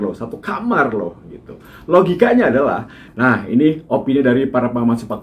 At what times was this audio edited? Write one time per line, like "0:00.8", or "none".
0:03.0